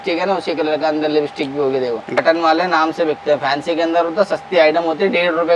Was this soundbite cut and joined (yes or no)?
yes